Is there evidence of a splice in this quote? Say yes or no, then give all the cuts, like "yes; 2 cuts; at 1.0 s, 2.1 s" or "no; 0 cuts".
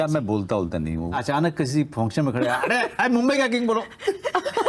yes; 2 cuts; at 1.1 s, 2.9 s